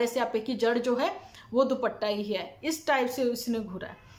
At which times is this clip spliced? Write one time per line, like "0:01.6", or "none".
none